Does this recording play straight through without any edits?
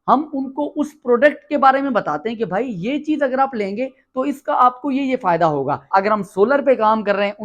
no; 1 cut; at 5.9 s

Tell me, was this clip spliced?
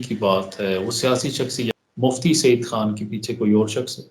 yes; 1 cut; at 1.7 s

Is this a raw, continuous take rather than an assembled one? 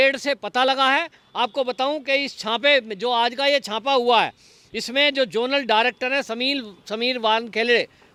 yes; 0 cuts

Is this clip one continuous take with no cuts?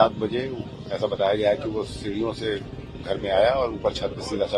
yes; 0 cuts

